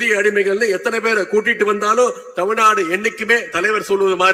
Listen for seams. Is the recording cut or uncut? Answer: uncut